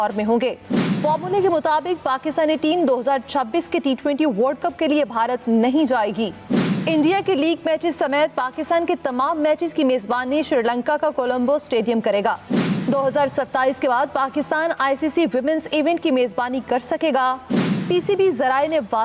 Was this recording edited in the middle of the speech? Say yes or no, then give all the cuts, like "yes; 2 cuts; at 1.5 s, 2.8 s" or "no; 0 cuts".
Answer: no; 0 cuts